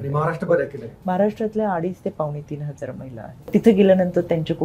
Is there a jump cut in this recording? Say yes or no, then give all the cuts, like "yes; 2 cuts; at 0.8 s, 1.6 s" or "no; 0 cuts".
yes; 1 cut; at 3.5 s